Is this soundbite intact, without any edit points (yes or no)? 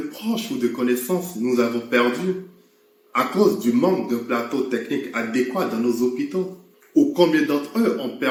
yes